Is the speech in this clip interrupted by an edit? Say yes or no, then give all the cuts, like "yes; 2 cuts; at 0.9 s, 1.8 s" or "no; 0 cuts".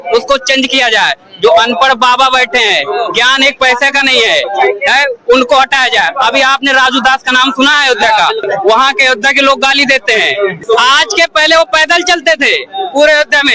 yes; 1 cut; at 10.6 s